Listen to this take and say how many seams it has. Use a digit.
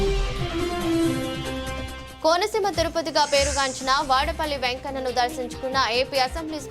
1